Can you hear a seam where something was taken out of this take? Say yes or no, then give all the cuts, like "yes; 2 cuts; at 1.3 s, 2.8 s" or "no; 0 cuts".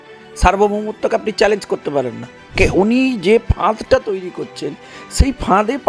yes; 1 cut; at 2.5 s